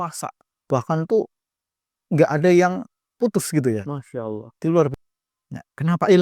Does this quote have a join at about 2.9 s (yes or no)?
no